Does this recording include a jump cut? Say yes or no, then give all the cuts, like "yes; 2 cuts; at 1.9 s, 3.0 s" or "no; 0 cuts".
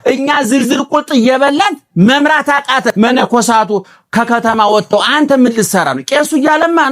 yes; 1 cut; at 2.9 s